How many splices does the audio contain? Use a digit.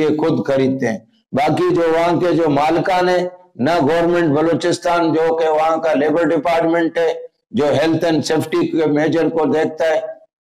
0